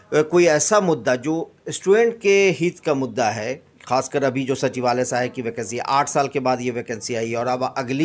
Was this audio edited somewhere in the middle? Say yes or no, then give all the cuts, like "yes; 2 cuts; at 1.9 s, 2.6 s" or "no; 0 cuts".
no; 0 cuts